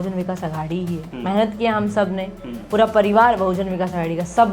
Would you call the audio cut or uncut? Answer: cut